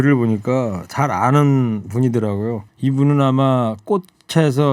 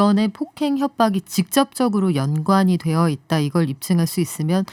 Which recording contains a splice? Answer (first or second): first